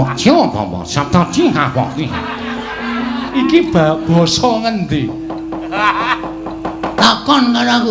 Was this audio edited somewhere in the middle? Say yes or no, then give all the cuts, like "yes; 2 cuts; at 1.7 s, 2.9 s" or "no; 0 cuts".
yes; 1 cut; at 3.3 s